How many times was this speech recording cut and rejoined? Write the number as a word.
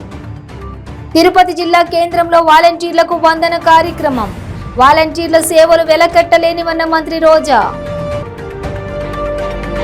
zero